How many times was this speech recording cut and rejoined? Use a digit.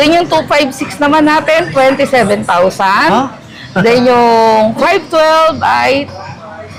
0